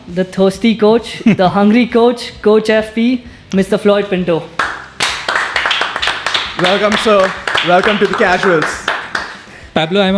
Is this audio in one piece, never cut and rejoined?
yes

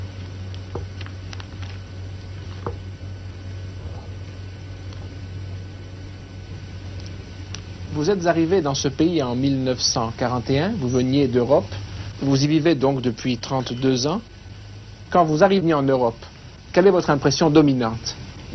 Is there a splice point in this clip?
no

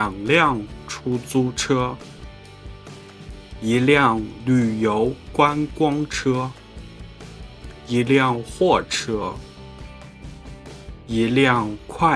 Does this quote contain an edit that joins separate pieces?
no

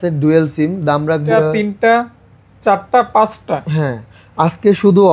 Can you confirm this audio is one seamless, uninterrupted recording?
no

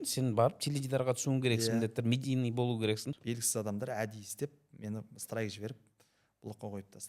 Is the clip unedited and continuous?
no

